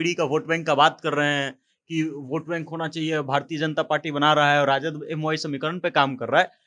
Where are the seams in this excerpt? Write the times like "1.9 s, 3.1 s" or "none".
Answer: none

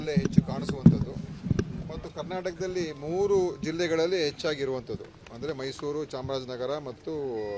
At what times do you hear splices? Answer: none

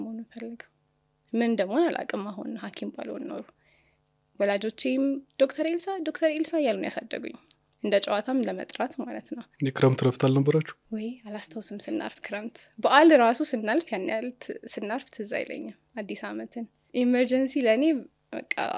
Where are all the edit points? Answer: 9.4 s, 16.8 s

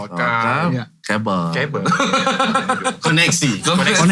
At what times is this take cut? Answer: none

